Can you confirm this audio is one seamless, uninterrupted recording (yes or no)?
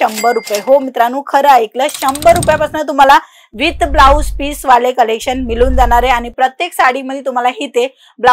yes